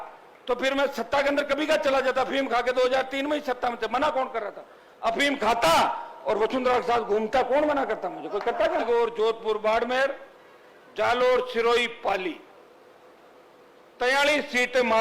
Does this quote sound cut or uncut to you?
cut